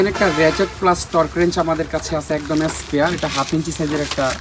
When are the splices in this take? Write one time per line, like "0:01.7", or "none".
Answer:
none